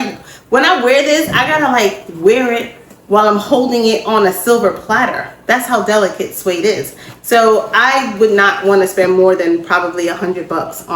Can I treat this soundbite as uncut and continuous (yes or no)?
yes